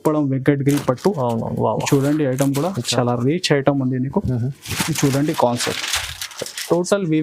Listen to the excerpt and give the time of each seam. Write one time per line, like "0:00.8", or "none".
none